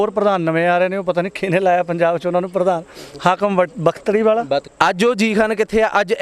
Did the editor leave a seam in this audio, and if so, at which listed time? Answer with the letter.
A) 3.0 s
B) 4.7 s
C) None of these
B